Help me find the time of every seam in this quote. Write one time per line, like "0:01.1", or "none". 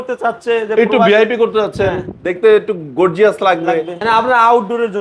0:04.0